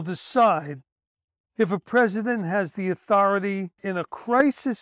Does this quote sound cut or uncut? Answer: cut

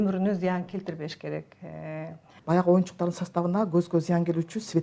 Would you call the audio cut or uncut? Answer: cut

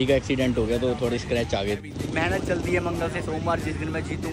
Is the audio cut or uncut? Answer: cut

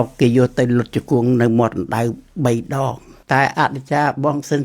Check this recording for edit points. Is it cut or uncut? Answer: cut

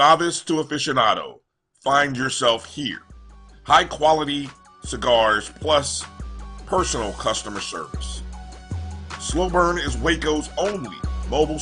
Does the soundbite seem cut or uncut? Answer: uncut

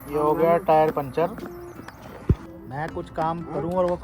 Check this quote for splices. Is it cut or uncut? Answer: cut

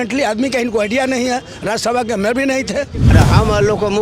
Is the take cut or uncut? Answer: cut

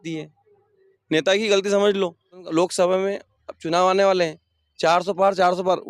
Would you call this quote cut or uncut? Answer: cut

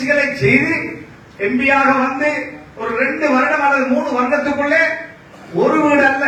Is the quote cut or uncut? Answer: uncut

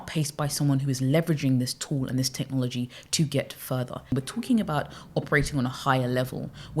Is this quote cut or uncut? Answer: cut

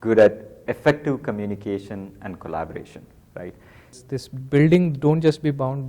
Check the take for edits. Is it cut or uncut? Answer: cut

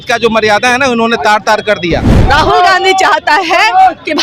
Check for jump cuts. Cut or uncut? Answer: cut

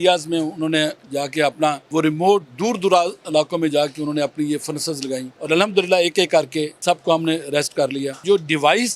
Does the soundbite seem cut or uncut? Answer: cut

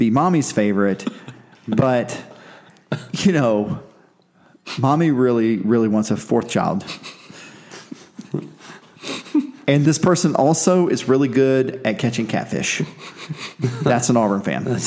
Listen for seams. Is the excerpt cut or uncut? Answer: cut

